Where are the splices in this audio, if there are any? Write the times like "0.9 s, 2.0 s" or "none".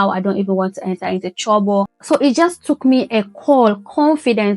1.9 s